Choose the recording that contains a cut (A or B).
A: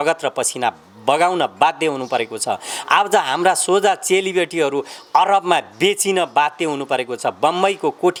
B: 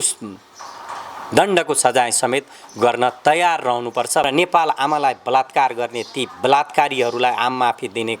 B